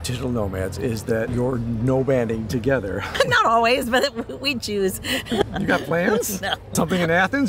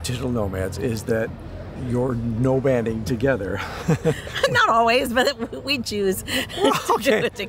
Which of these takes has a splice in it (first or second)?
first